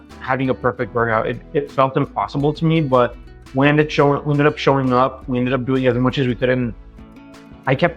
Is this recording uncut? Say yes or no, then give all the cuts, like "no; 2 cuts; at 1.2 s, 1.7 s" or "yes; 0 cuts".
yes; 0 cuts